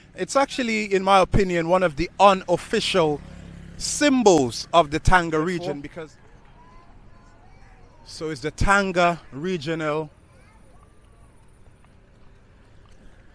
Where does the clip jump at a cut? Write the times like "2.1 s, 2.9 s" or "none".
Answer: 5.8 s